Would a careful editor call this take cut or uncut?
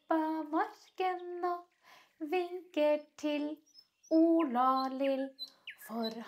uncut